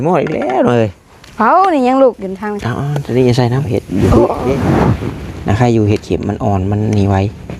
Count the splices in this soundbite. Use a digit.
1